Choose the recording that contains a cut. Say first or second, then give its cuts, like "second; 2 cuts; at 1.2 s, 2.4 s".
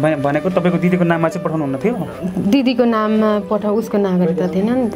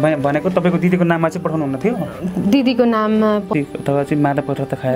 second; 1 cut; at 3.5 s